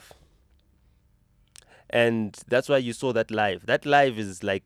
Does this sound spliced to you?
no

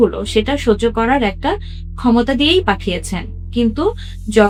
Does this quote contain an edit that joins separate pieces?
no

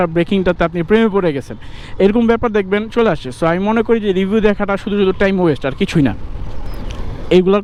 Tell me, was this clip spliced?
no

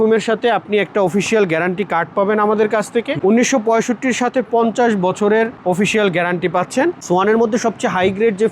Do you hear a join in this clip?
yes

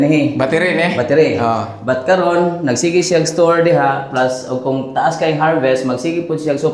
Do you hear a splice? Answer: no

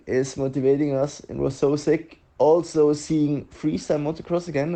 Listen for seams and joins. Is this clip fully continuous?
yes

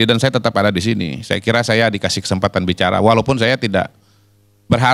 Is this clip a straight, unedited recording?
yes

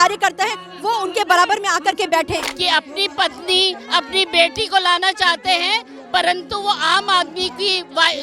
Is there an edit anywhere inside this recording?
yes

